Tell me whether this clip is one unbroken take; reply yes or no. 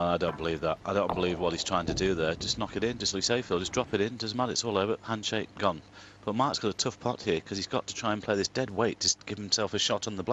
yes